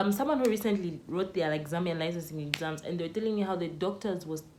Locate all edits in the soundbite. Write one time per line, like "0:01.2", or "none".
none